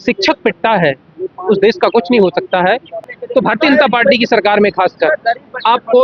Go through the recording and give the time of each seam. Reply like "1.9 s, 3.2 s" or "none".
3.1 s